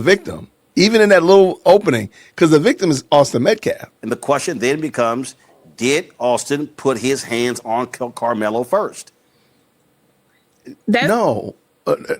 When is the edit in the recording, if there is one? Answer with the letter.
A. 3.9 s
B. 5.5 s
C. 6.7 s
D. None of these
A